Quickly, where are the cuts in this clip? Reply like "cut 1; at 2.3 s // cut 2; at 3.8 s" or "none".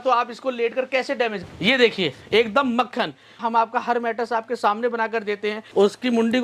cut 1; at 1.4 s // cut 2; at 3.4 s // cut 3; at 5.6 s